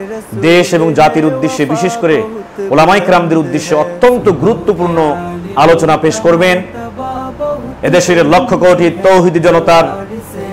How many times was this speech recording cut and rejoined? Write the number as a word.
zero